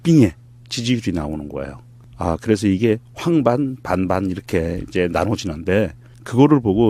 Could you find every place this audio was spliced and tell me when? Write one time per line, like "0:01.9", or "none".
none